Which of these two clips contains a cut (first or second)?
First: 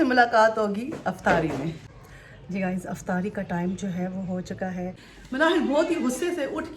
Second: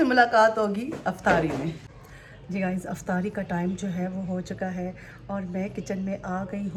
first